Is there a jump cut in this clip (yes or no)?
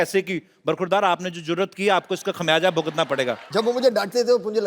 yes